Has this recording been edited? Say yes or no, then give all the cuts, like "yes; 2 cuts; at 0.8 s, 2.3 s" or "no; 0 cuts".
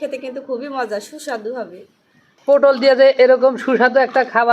yes; 1 cut; at 2.5 s